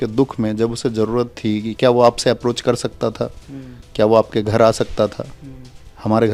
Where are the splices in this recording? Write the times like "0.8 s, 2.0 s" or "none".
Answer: none